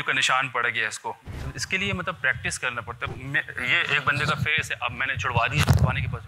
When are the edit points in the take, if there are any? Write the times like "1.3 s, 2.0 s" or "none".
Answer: 1.4 s, 3.1 s